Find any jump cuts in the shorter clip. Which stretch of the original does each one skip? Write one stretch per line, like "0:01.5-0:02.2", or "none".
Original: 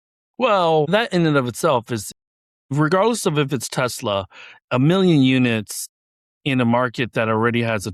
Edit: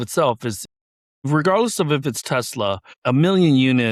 0:04.4-0:04.6